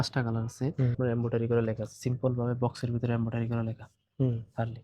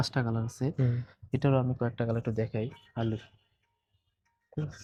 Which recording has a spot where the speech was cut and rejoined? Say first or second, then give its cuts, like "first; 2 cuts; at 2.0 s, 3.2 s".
first; 1 cut; at 1.0 s